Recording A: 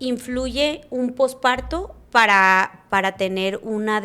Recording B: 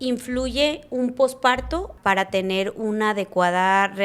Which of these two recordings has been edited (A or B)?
B